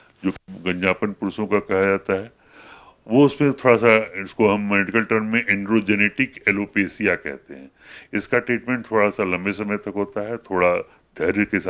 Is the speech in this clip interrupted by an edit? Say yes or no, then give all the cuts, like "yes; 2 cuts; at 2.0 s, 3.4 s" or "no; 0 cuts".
no; 0 cuts